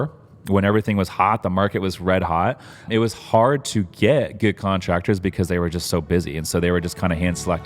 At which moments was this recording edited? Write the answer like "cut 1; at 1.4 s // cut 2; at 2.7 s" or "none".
cut 1; at 2.9 s